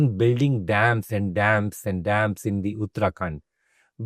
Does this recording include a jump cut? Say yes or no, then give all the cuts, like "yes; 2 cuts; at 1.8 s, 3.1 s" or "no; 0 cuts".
no; 0 cuts